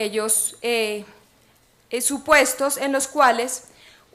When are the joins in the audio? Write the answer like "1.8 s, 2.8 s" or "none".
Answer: 3.0 s